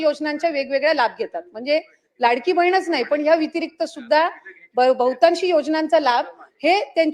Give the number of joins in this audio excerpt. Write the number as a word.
zero